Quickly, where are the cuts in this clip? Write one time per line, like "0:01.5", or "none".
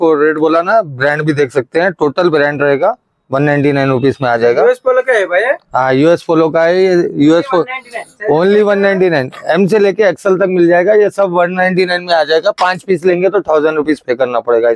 none